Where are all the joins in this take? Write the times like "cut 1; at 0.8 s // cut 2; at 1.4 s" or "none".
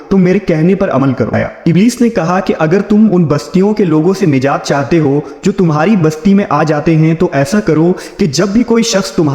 cut 1; at 1.3 s